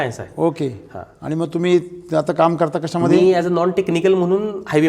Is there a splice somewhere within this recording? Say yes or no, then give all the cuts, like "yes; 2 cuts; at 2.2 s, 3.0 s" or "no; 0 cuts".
no; 0 cuts